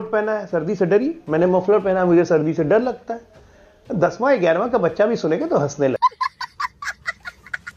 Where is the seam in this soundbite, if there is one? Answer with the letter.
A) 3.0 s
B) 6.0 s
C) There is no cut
B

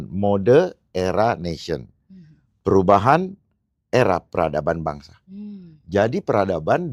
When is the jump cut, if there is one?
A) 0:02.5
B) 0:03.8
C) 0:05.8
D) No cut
D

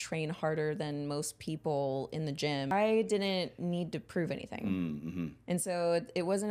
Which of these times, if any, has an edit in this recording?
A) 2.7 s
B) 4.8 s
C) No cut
A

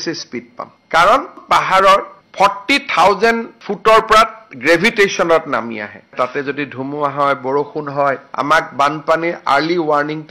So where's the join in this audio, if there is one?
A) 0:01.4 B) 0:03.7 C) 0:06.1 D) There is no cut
C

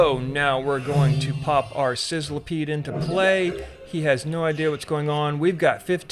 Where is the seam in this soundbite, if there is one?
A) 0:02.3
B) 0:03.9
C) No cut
C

